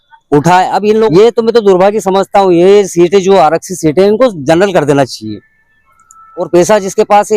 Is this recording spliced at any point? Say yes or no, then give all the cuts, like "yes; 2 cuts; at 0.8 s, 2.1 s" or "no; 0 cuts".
yes; 2 cuts; at 1.1 s, 6.4 s